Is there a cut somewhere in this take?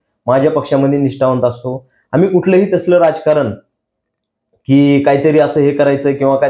no; 0 cuts

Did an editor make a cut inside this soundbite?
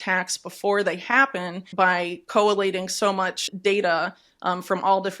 yes; 2 cuts; at 1.7 s, 3.4 s

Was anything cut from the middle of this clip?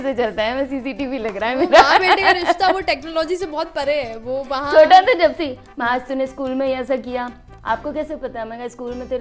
no; 0 cuts

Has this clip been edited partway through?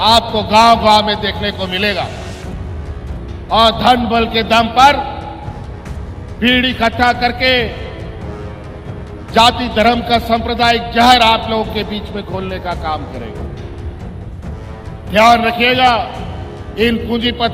no; 0 cuts

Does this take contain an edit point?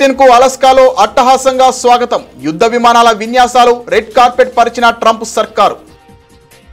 yes; 1 cut; at 5.8 s

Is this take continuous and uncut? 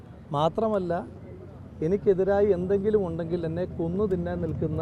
yes; 0 cuts

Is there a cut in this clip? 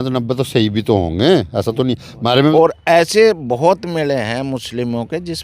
yes; 1 cut; at 2.5 s

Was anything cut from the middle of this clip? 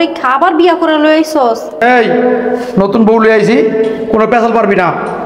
yes; 1 cut; at 1.8 s

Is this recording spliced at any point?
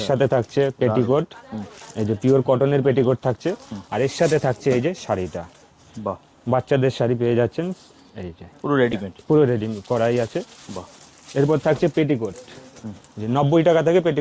no; 0 cuts

